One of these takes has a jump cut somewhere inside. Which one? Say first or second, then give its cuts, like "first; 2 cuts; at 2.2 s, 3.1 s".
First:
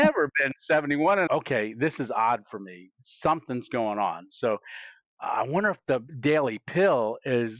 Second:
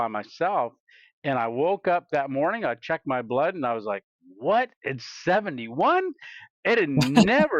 first; 2 cuts; at 1.3 s, 6.1 s